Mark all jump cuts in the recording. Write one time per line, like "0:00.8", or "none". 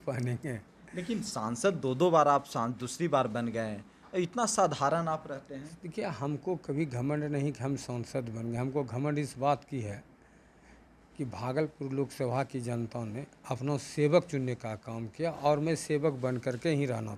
none